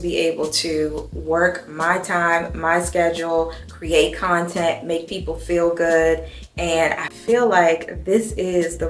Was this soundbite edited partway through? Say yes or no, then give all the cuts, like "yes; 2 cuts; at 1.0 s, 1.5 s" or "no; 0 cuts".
no; 0 cuts